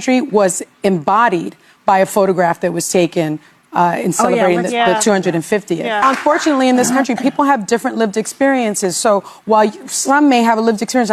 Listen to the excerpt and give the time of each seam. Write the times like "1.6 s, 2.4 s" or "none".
none

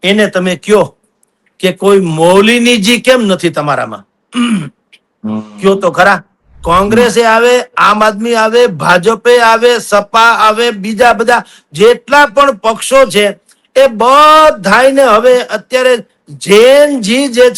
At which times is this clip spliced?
6.5 s

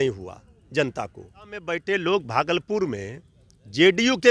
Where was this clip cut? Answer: 1.7 s

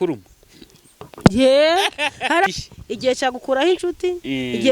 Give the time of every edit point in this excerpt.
2.5 s

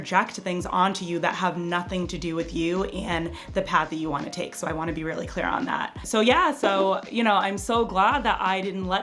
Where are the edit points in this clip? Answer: none

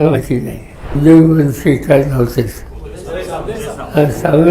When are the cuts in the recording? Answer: 1.0 s

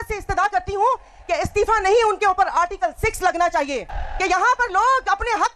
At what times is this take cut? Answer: 4.0 s

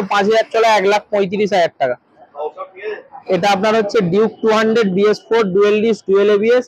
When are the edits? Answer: 3.1 s

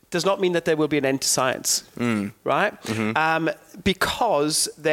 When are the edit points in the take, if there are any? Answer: none

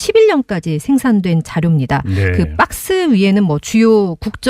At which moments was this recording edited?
2.8 s

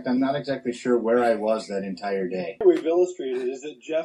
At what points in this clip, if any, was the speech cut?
2.6 s

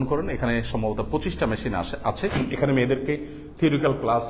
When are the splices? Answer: 2.4 s

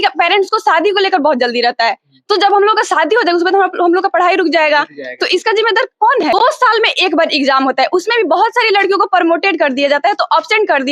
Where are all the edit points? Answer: 6.3 s

